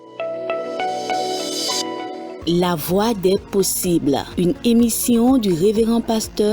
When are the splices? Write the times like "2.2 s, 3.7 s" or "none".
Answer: 1.9 s